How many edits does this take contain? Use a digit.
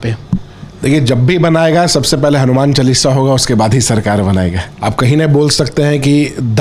1